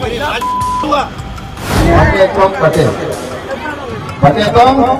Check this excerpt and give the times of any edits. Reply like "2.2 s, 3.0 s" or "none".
1.8 s